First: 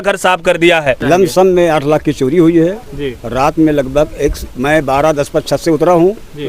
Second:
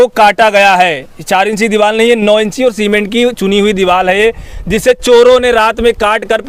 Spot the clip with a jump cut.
first; 1 cut; at 1.0 s

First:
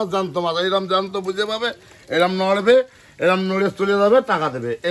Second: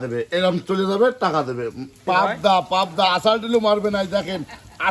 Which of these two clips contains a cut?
second; 1 cut; at 2.0 s

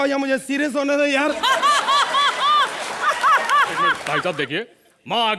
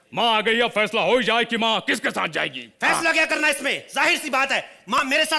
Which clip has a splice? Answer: first; 1 cut; at 4.0 s

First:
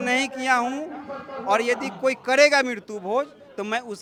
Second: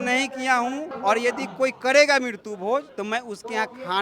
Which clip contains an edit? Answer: second; 2 cuts; at 0.9 s, 2.9 s

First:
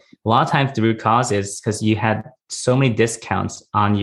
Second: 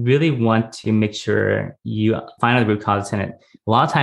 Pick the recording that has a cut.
second; 1 cut; at 2.3 s

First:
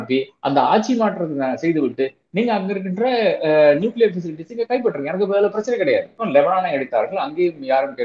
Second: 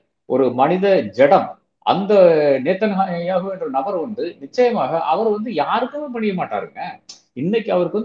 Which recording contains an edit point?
first; 1 cut; at 6.2 s

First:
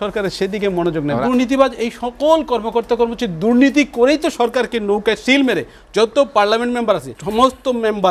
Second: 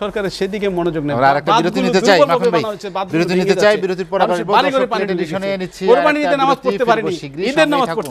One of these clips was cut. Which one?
first; 2 cuts; at 1.2 s, 7.2 s

